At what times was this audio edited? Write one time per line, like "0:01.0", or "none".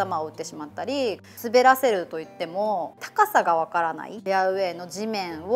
0:01.2
0:03.0
0:04.2